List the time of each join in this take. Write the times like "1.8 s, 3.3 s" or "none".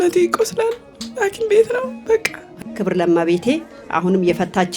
2.4 s